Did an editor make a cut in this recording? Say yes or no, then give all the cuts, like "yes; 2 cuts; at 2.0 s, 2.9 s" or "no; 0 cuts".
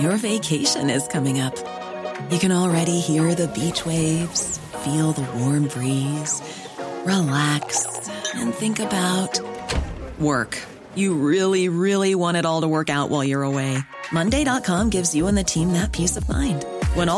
no; 0 cuts